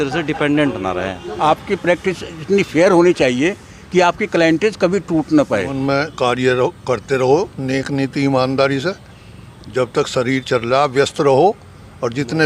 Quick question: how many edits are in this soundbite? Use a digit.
2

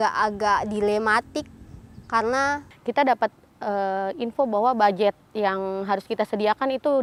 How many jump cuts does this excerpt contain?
0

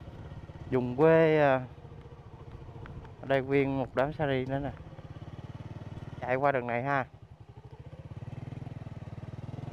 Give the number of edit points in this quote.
1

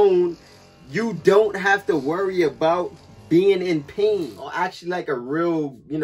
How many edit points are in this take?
1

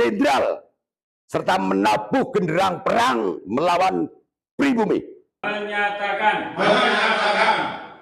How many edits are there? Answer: 1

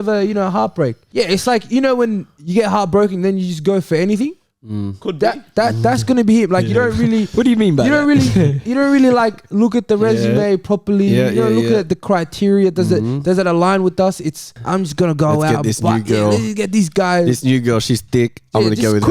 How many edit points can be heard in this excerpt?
2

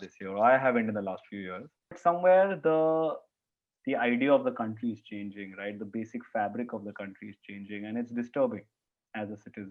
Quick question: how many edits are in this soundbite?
1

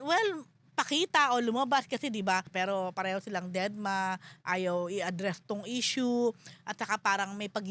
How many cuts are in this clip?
1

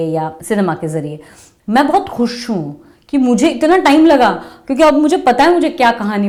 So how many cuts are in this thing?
0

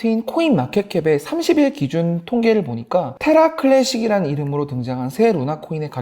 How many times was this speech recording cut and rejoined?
1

